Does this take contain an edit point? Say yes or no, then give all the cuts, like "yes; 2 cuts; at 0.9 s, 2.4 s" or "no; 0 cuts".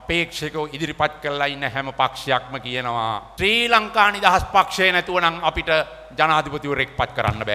yes; 1 cut; at 3.3 s